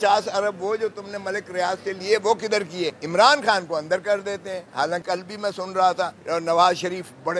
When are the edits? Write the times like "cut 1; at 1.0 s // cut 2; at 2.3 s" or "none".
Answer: cut 1; at 3.0 s // cut 2; at 5.0 s // cut 3; at 6.2 s